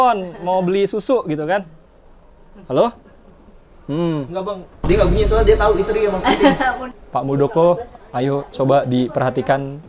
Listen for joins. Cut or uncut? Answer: cut